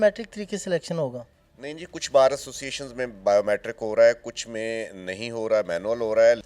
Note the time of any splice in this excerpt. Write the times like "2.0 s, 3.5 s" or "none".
none